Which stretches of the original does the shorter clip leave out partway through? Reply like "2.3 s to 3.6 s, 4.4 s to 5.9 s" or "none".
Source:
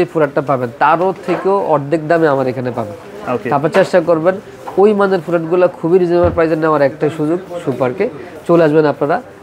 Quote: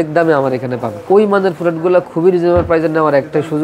2.9 s to 4.6 s